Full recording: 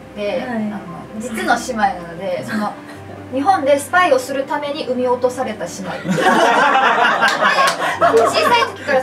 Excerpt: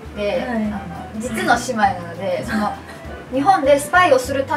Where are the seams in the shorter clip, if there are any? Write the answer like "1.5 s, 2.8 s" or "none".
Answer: none